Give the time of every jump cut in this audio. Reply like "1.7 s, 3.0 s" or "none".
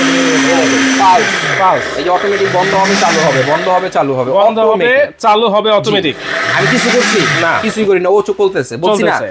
none